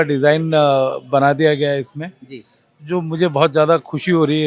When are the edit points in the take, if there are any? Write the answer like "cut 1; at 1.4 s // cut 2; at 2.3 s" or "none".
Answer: none

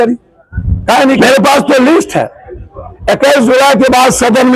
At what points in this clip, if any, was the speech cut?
cut 1; at 1.2 s

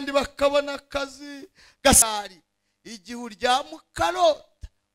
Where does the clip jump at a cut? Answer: cut 1; at 2.0 s

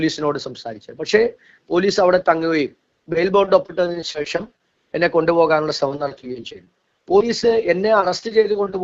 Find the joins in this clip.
none

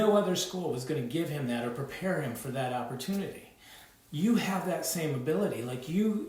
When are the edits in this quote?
none

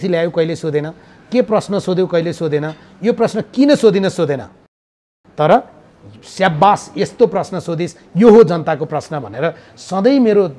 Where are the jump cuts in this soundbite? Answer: none

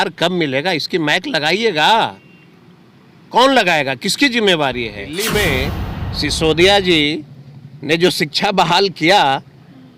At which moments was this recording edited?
cut 1; at 5.1 s

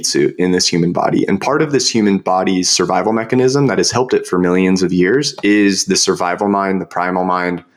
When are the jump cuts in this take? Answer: none

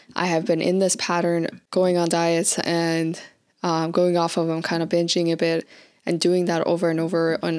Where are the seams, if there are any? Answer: cut 1; at 1.6 s

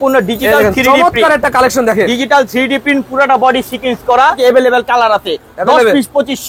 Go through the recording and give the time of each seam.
cut 1; at 4.4 s

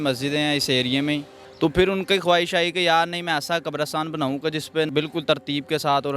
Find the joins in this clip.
cut 1; at 1.4 s // cut 2; at 4.9 s

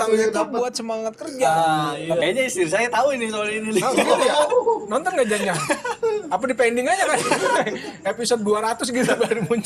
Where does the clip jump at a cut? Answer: cut 1; at 2.2 s

